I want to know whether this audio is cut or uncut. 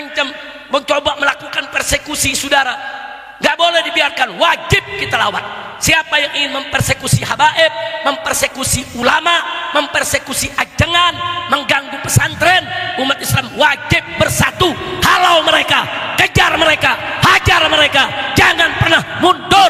uncut